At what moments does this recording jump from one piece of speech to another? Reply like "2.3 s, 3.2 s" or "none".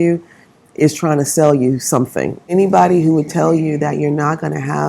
2.5 s